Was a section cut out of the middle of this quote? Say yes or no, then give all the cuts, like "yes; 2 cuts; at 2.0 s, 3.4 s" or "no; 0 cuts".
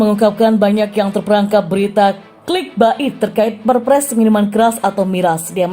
yes; 1 cut; at 2.3 s